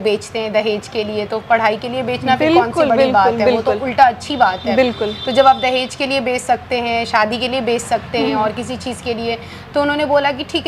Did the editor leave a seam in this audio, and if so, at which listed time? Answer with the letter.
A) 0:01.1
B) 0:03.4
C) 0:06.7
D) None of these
D